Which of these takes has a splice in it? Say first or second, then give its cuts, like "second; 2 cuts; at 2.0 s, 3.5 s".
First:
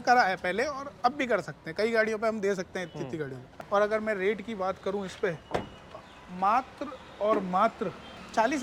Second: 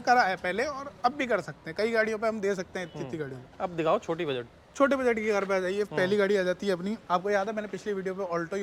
first; 1 cut; at 3.5 s